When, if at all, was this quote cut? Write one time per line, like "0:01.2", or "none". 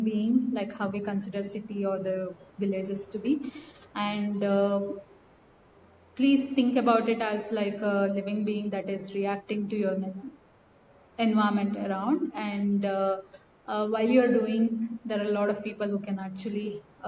none